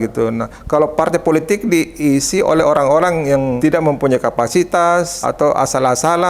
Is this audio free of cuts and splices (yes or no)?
no